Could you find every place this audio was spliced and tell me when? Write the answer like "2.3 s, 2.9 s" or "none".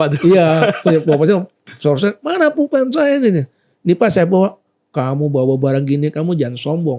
none

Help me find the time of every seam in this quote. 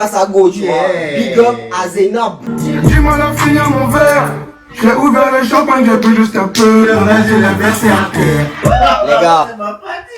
2.5 s

